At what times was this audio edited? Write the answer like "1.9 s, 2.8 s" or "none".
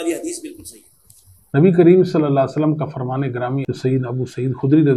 1.3 s